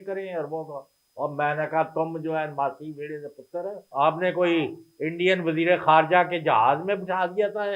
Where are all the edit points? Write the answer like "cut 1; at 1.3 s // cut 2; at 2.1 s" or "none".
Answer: cut 1; at 3.8 s